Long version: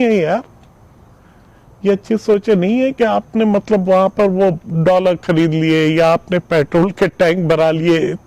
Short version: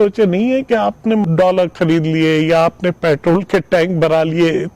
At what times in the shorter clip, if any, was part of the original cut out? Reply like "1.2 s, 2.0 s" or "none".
1.2 s